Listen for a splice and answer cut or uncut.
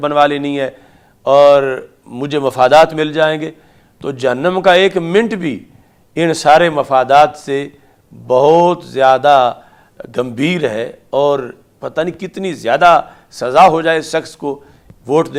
uncut